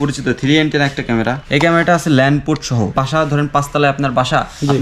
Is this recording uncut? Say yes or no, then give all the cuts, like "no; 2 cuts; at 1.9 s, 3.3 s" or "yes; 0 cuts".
no; 2 cuts; at 1.4 s, 2.9 s